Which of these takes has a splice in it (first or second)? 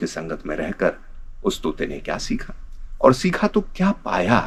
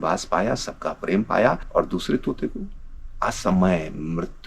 second